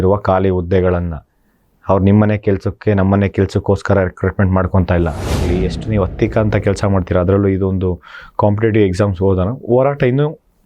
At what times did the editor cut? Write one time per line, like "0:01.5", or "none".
0:05.4

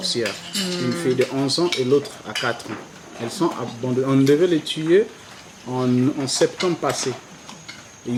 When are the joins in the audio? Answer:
none

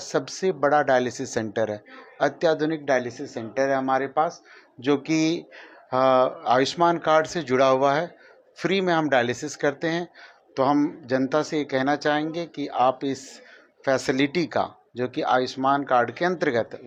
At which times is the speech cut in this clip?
none

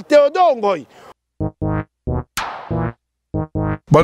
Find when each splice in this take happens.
0:01.1

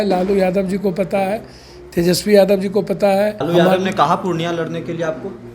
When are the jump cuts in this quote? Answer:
0:03.4

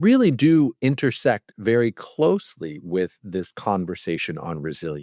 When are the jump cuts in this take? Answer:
none

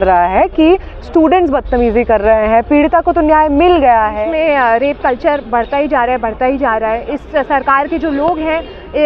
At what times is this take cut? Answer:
0:04.2

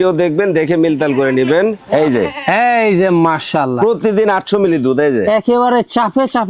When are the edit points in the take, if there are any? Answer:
0:01.8

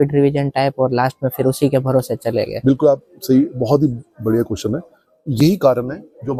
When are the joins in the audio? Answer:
none

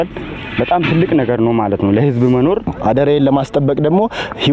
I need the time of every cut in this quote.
0:02.7

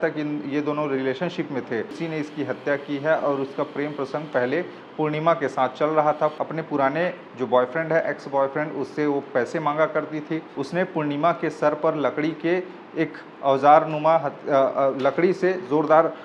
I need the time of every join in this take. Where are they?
0:02.0
0:06.3
0:10.5

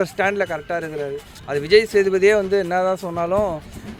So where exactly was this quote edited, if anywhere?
none

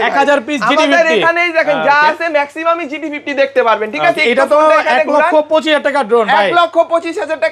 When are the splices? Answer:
none

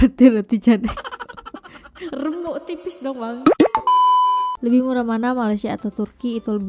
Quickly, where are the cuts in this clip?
0:04.3

